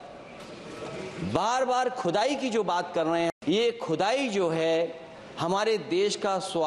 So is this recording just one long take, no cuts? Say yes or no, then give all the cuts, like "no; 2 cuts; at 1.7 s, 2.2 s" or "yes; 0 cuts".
no; 1 cut; at 3.3 s